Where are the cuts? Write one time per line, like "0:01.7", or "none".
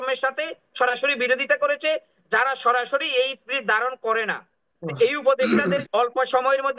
0:05.8